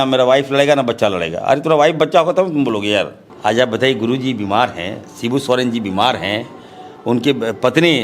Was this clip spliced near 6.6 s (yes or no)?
no